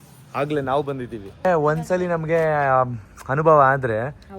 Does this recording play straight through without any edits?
no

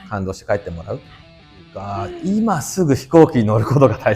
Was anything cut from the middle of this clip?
yes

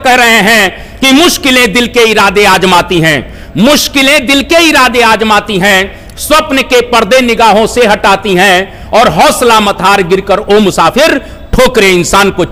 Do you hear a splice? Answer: no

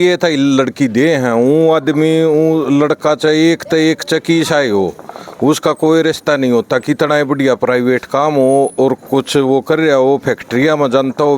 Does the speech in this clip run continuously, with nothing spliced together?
yes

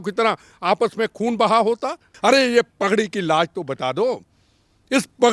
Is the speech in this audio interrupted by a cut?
yes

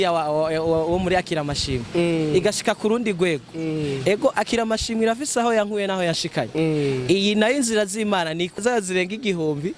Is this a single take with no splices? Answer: no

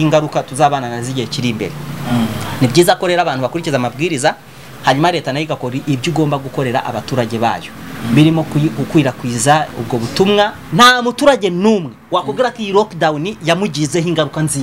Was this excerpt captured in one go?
no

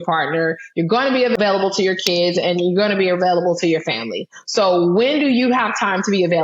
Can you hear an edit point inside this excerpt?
yes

